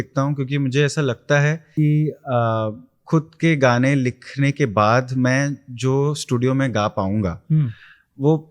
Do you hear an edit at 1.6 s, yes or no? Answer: yes